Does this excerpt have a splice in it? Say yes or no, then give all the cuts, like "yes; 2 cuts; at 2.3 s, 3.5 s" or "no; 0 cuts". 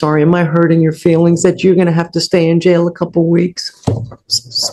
no; 0 cuts